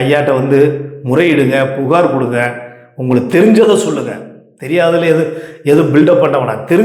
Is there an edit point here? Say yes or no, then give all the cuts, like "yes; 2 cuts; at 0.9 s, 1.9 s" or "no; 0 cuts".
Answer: no; 0 cuts